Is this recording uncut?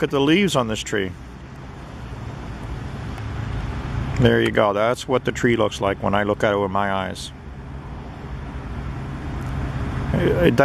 no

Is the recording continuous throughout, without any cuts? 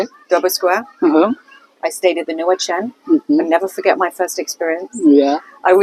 yes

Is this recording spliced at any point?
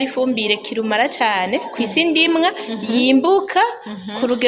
no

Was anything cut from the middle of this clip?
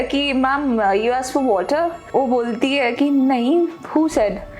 yes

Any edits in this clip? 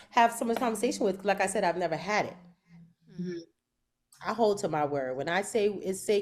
no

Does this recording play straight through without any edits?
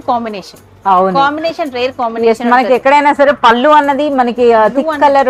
yes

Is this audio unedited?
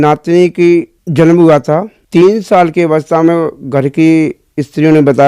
no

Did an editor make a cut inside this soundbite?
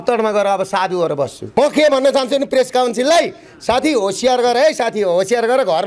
yes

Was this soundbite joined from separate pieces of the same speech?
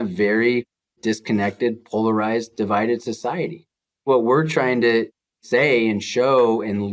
yes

